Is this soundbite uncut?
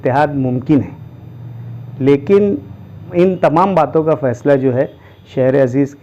no; 1 cut; at 3.1 s

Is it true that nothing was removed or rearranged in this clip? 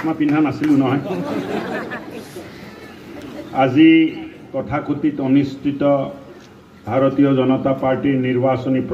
yes; 0 cuts

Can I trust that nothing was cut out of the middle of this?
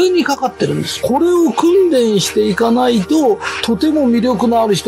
no; 1 cut; at 0.9 s

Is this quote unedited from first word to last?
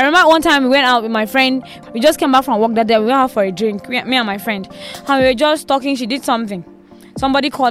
no; 1 cut; at 1.7 s

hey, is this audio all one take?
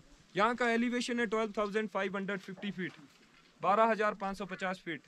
yes; 0 cuts

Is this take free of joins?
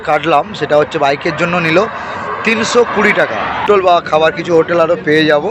no; 1 cut; at 3.6 s

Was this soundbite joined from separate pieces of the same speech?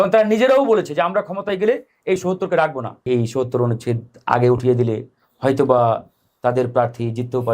yes; 1 cut; at 3.1 s

